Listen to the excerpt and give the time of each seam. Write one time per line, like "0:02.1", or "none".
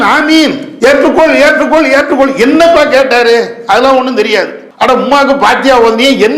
0:04.6